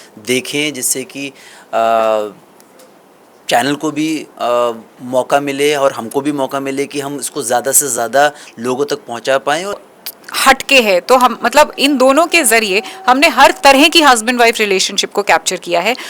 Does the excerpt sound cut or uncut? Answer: cut